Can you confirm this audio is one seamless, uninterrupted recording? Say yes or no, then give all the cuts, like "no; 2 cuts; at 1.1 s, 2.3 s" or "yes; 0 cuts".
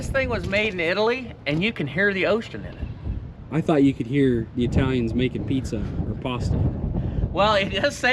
yes; 0 cuts